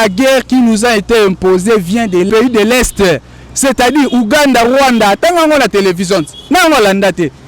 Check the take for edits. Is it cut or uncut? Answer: cut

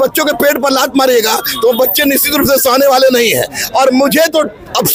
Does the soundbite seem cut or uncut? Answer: uncut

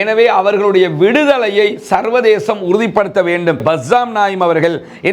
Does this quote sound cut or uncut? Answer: cut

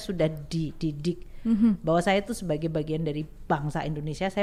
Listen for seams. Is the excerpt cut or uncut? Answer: uncut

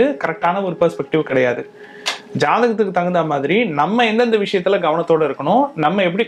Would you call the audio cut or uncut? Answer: uncut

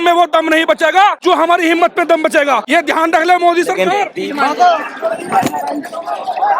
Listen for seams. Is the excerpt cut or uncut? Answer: cut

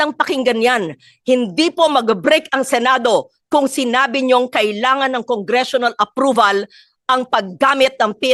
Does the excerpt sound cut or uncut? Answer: uncut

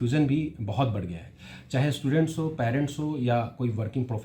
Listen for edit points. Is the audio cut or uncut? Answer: uncut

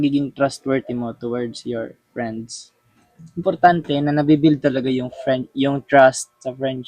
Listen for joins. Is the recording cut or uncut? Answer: uncut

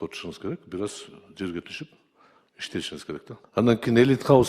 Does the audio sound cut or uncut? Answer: cut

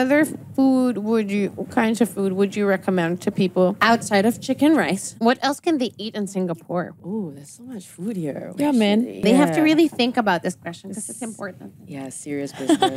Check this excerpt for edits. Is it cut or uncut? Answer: cut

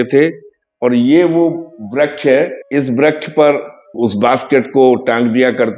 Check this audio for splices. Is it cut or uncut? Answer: cut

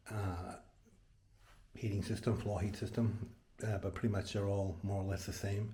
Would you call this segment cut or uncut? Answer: uncut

